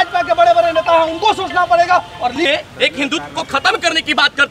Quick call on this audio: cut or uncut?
cut